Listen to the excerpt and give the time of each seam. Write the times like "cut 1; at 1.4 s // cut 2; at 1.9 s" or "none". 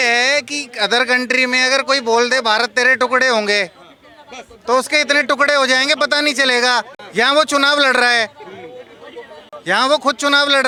none

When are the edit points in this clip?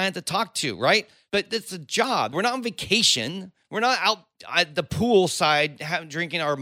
cut 1; at 1.2 s // cut 2; at 2.3 s // cut 3; at 4.3 s

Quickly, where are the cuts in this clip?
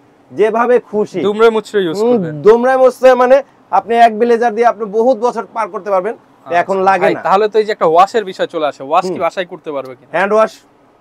none

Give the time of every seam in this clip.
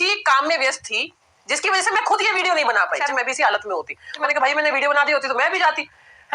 cut 1; at 3.0 s // cut 2; at 4.2 s

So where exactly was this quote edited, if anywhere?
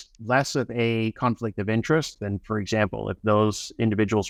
none

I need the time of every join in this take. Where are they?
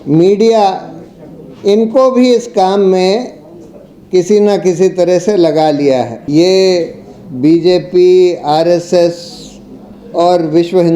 cut 1; at 6.2 s

